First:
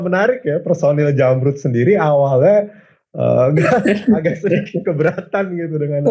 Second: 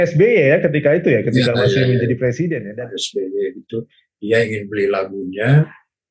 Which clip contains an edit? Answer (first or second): second